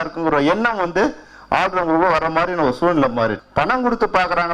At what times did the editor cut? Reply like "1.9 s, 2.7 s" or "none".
3.4 s